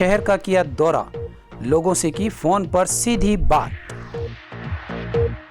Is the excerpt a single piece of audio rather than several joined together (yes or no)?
no